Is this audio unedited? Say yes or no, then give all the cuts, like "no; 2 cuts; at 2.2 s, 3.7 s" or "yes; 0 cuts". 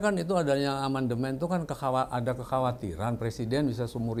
yes; 0 cuts